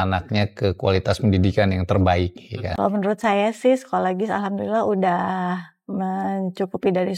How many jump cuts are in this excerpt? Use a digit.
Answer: 1